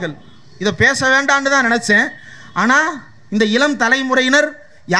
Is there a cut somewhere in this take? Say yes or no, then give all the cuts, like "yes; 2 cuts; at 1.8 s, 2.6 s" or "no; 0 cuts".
no; 0 cuts